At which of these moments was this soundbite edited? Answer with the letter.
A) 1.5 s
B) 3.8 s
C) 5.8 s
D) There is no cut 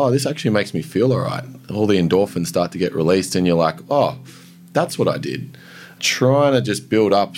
C